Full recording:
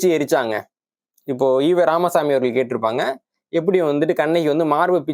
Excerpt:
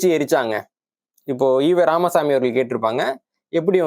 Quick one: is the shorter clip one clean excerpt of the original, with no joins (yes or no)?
yes